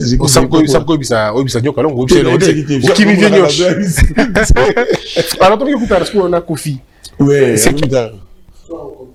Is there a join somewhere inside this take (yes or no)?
no